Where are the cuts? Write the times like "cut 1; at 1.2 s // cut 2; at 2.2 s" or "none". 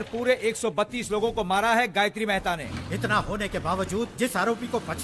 cut 1; at 2.6 s